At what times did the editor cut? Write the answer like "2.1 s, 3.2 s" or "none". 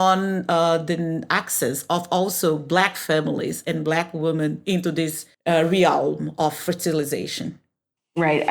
5.3 s